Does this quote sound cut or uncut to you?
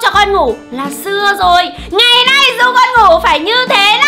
uncut